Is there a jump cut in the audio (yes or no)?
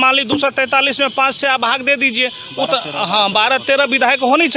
no